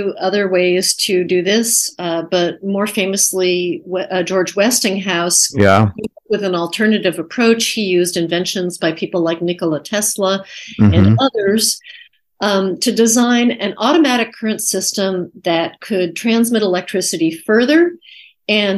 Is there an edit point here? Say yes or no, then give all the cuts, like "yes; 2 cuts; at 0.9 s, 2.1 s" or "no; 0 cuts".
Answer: no; 0 cuts